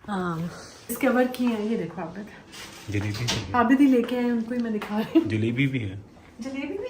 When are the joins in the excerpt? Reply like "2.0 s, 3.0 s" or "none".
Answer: 0.9 s